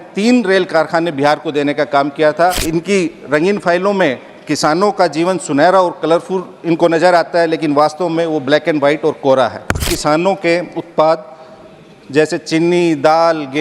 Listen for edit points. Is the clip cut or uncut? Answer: cut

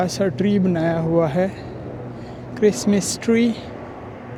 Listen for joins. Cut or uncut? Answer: uncut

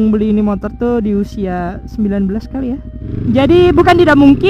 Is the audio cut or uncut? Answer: cut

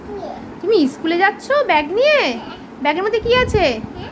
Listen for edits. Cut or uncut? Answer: uncut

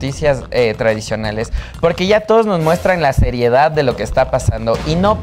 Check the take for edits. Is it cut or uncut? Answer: uncut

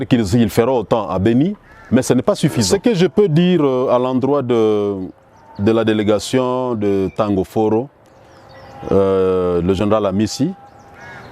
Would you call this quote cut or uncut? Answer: cut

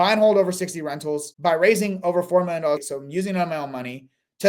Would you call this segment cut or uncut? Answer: cut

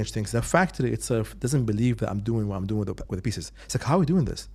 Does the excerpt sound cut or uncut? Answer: uncut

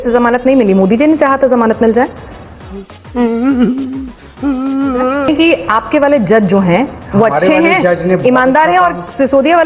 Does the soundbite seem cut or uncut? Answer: cut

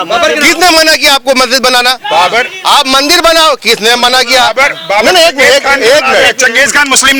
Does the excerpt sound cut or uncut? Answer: uncut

